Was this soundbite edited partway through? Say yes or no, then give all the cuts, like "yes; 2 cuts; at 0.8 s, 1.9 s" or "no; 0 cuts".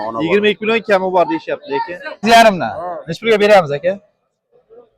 yes; 1 cut; at 2.2 s